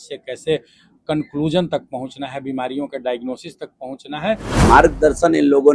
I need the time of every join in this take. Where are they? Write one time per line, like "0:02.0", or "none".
0:04.5